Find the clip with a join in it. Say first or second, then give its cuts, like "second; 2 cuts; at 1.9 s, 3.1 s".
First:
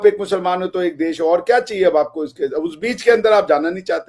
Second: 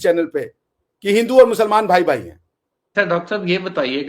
second; 1 cut; at 2.9 s